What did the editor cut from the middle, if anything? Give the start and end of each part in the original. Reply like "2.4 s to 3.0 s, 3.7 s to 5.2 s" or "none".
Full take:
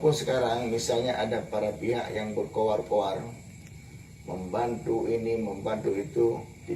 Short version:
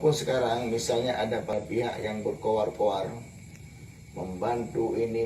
1.5 s to 1.6 s